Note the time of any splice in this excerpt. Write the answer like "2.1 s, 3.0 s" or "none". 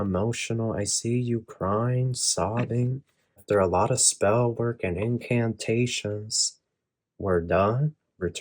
3.4 s